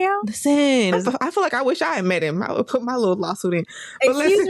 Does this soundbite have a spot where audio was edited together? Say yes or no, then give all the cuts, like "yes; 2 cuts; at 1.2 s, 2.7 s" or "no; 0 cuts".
yes; 1 cut; at 0.9 s